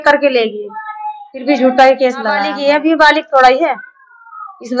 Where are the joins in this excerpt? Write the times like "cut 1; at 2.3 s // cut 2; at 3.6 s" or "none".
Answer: cut 1; at 2.5 s